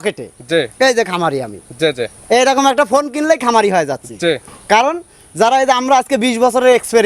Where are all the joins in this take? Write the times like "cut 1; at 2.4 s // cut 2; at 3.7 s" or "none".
none